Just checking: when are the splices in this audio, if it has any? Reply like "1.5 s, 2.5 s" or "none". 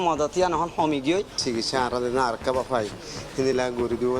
1.4 s